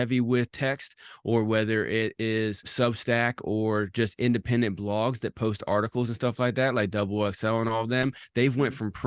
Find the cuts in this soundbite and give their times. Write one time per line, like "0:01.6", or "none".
0:02.7

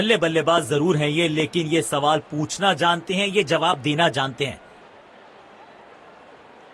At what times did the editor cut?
none

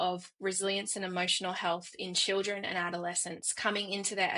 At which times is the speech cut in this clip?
none

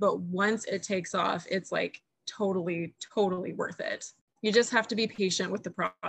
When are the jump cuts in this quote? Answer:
0:04.2

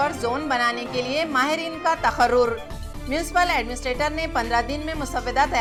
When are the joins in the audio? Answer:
none

